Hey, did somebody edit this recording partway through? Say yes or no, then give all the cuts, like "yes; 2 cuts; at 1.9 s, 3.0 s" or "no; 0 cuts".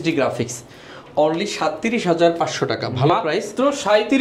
no; 0 cuts